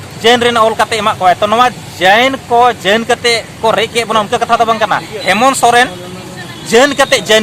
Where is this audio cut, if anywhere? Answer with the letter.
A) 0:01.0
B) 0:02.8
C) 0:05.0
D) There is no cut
D